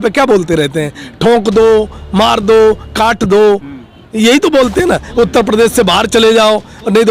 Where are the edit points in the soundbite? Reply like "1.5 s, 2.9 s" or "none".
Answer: none